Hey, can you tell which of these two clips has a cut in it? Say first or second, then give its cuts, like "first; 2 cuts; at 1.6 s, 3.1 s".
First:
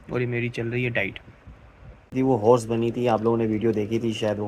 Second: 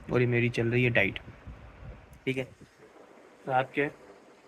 first; 1 cut; at 2.1 s